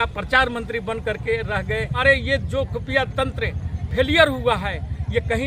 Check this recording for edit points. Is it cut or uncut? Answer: cut